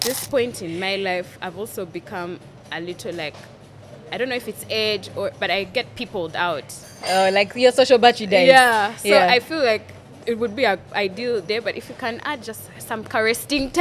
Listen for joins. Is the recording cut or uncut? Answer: uncut